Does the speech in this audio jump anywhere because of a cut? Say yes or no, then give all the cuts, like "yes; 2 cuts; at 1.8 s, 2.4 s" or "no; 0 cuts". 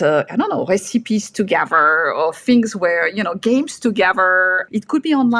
no; 0 cuts